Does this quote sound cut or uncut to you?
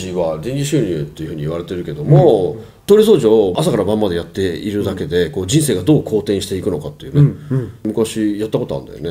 cut